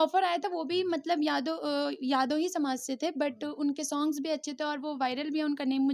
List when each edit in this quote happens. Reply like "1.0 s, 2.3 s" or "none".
none